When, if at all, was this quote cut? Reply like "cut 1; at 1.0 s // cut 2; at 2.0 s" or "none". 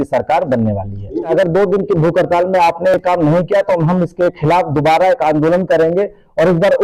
cut 1; at 1.3 s